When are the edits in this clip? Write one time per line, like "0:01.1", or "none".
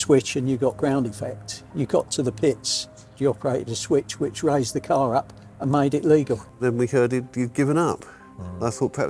0:03.2
0:06.5